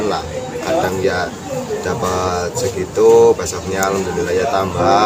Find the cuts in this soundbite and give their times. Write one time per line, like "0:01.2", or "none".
none